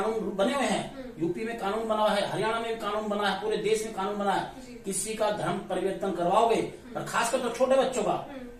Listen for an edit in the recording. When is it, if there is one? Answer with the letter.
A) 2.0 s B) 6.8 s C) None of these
C